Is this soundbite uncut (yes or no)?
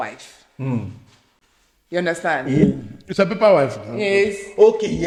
yes